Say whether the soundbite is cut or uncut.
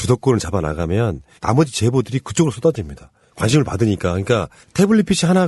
uncut